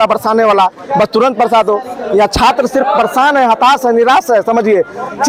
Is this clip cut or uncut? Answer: uncut